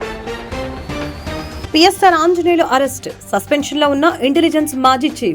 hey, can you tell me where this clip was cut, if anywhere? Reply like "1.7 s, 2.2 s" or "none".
1.5 s